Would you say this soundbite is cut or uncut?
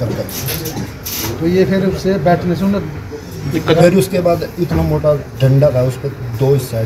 uncut